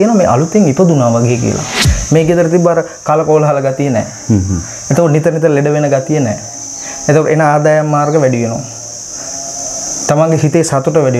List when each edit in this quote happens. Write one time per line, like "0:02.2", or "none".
0:01.7